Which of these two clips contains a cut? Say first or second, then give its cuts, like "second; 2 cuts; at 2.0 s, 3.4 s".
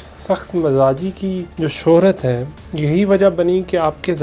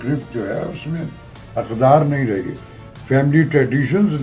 first; 1 cut; at 1.5 s